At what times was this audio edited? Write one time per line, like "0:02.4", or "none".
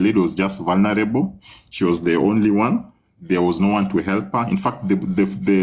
none